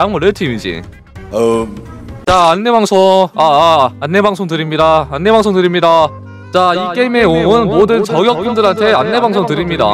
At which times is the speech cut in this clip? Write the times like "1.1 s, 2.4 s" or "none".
none